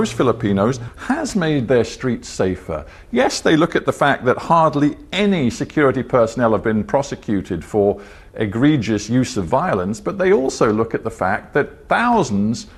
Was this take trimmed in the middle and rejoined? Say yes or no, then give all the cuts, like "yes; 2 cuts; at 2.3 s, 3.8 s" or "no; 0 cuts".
no; 0 cuts